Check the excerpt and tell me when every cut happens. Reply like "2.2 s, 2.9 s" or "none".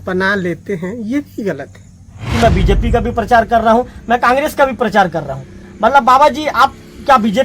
2.3 s